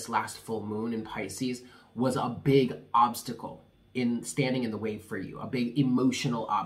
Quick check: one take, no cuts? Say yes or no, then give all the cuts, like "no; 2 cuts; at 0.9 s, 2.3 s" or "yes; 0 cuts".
yes; 0 cuts